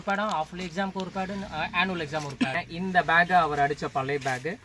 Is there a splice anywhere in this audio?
yes; 1 cut; at 2.6 s

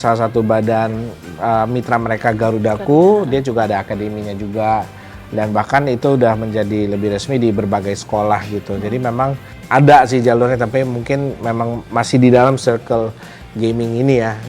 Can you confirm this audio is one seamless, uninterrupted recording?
no; 1 cut; at 9.6 s

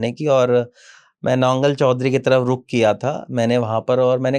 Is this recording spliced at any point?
no; 0 cuts

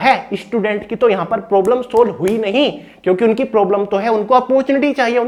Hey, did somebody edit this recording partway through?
no; 0 cuts

